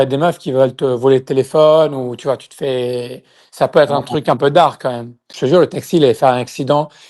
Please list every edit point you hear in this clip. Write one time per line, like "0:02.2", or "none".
0:05.3